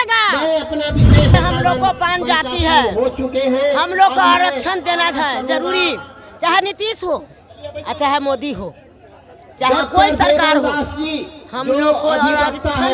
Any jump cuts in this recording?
yes; 1 cut; at 1.3 s

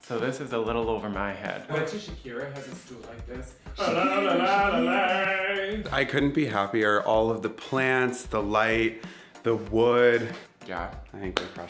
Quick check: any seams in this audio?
yes; 3 cuts; at 1.7 s, 5.9 s, 10.4 s

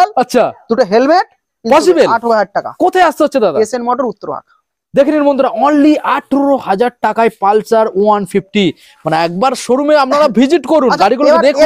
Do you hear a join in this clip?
no; 0 cuts

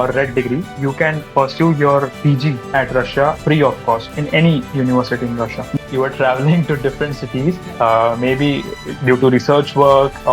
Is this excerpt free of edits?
no; 1 cut; at 5.8 s

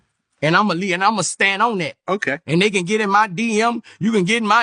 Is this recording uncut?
yes; 0 cuts

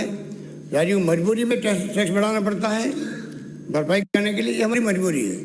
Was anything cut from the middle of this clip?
no; 0 cuts

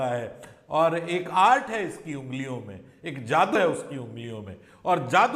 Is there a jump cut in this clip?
no; 0 cuts

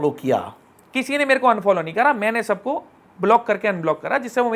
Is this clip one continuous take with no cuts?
yes; 0 cuts

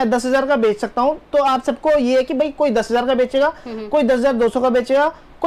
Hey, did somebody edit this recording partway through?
no; 0 cuts

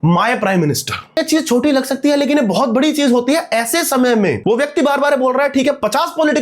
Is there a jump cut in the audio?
yes; 2 cuts; at 1.2 s, 4.4 s

